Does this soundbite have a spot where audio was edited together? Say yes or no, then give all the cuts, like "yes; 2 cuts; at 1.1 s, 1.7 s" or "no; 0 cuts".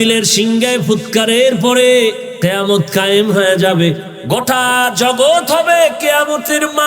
yes; 2 cuts; at 2.3 s, 4.1 s